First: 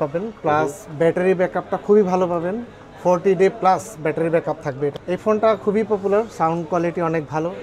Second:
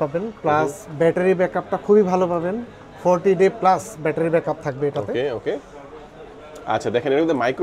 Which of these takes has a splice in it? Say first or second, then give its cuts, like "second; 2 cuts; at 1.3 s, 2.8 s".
first; 1 cut; at 5.0 s